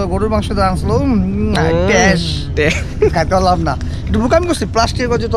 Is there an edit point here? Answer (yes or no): no